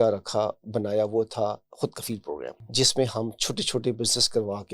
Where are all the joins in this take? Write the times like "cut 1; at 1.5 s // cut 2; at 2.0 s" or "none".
cut 1; at 2.6 s

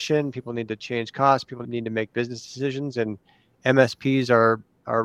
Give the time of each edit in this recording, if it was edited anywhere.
cut 1; at 1.6 s

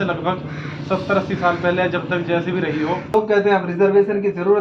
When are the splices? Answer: cut 1; at 3.1 s

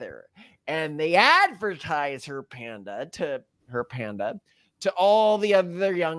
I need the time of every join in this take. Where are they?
none

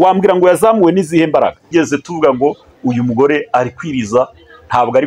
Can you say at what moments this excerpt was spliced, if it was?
cut 1; at 1.6 s

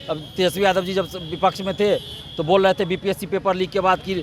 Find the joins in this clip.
none

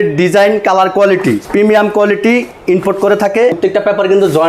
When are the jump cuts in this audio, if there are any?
cut 1; at 1.4 s // cut 2; at 3.6 s

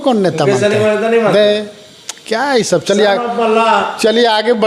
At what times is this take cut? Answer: none

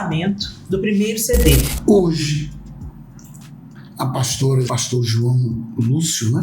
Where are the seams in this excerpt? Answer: cut 1; at 1.7 s // cut 2; at 4.8 s

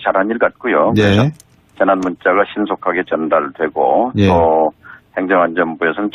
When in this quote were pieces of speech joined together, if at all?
none

